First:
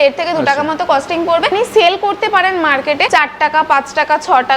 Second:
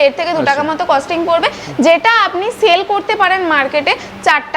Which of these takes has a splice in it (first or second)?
first